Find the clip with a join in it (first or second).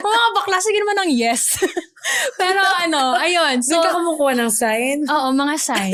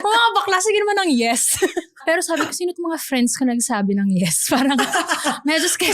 second